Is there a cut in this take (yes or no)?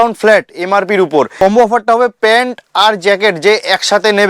yes